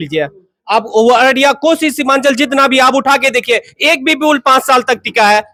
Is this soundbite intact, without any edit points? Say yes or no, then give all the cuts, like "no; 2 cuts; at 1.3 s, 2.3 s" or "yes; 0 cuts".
yes; 0 cuts